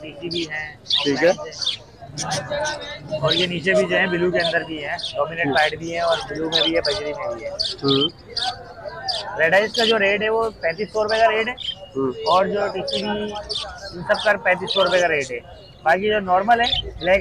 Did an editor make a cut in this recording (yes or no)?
no